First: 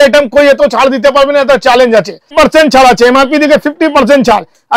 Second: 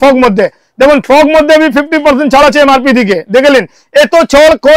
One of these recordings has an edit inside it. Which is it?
first; 1 cut; at 2.3 s

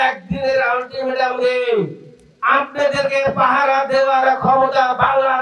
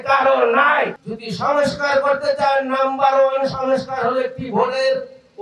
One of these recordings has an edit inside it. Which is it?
second; 1 cut; at 1.0 s

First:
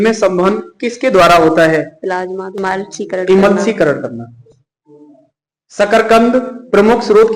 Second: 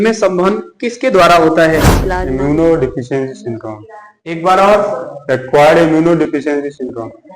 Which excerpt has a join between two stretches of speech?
second; 1 cut; at 2.3 s

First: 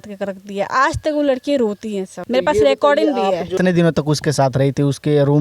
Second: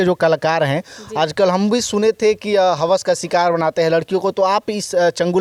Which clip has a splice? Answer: first; 2 cuts; at 2.1 s, 3.6 s

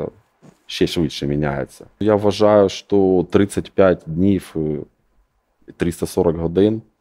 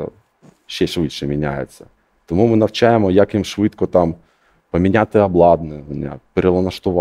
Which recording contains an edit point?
first; 1 cut; at 2.0 s

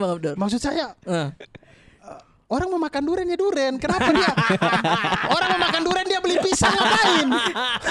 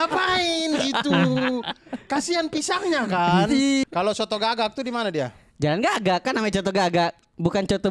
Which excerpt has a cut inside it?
second; 1 cut; at 3.8 s

